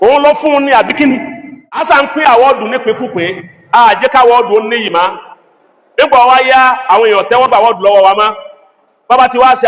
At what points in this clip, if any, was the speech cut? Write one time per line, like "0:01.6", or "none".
0:01.8